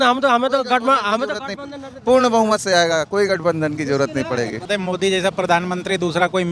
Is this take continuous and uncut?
no; 1 cut; at 4.6 s

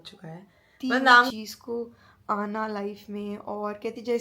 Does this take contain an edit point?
yes; 1 cut; at 1.3 s

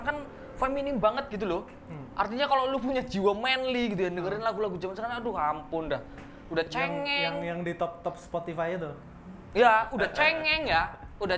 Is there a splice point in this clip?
no; 0 cuts

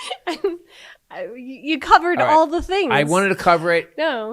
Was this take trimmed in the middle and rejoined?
no; 0 cuts

